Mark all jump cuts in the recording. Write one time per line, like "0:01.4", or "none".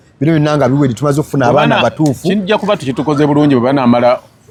none